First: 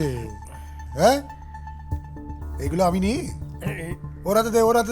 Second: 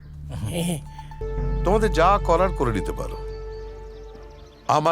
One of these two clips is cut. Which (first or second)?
second